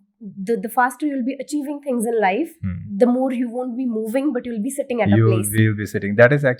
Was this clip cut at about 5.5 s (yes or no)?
no